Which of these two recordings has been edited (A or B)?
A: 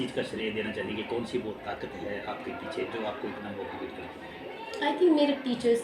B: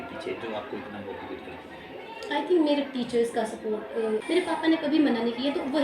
B